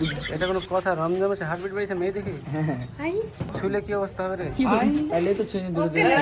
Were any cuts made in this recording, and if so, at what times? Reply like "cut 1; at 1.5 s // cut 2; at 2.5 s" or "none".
cut 1; at 3.5 s

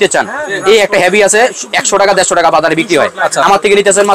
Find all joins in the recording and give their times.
none

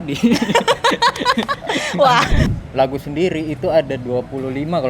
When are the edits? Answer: cut 1; at 2.4 s

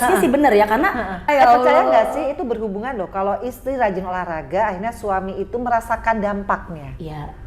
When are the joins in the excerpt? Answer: cut 1; at 1.3 s

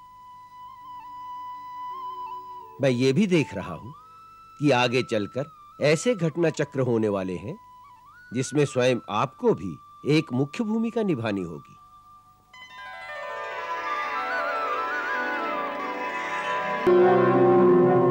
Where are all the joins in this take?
cut 1; at 16.9 s

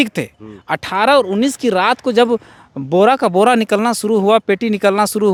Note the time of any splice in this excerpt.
none

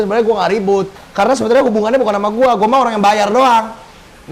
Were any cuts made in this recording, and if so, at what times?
cut 1; at 1.0 s

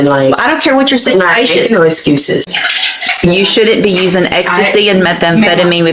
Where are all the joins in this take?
cut 1; at 2.5 s

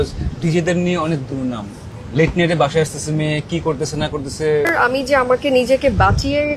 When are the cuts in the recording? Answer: cut 1; at 1.9 s // cut 2; at 4.7 s

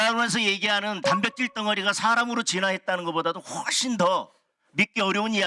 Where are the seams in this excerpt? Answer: none

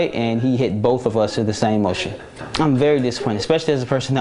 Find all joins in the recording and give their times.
cut 1; at 2.4 s

